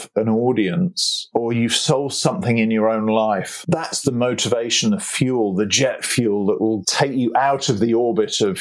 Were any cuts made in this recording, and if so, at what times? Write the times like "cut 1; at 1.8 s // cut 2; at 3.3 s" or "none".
cut 1; at 1.2 s // cut 2; at 3.5 s // cut 3; at 6.9 s